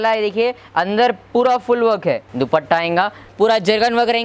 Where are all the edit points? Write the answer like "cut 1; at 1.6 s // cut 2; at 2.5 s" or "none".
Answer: cut 1; at 2.3 s // cut 2; at 3.2 s